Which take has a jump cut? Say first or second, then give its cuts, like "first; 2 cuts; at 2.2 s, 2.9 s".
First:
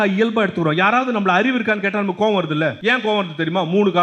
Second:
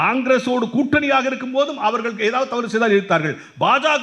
first; 1 cut; at 2.8 s